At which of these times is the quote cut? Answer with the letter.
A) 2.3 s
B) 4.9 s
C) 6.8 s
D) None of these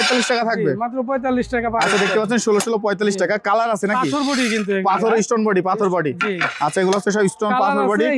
D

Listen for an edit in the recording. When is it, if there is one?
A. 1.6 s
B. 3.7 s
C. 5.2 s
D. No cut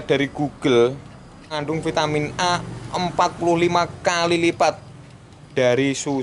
A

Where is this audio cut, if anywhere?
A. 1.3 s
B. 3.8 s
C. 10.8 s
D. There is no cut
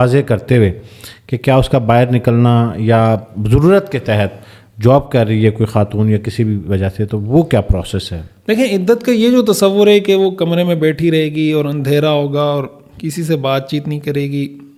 D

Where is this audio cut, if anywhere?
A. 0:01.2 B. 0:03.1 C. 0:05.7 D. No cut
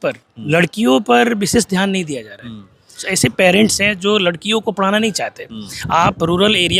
B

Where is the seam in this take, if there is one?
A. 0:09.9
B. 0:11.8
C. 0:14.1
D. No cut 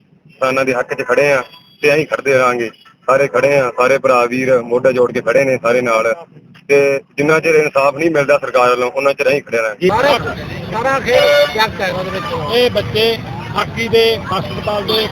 A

